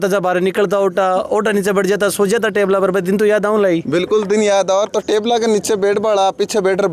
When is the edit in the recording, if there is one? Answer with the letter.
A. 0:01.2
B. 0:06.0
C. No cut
C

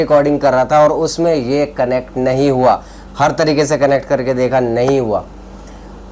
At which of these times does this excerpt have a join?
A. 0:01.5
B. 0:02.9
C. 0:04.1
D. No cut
D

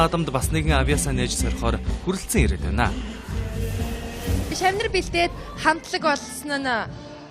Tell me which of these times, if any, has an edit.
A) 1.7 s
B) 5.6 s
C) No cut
B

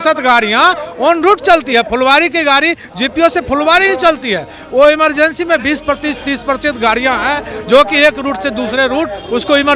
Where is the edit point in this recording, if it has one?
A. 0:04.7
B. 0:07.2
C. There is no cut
C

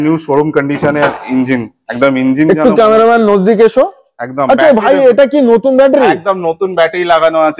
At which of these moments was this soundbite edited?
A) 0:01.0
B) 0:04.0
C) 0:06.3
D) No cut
D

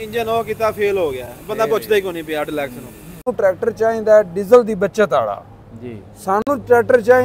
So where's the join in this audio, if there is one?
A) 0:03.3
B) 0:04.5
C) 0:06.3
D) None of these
A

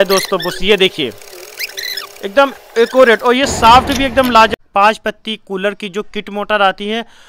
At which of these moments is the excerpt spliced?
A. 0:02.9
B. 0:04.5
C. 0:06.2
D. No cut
B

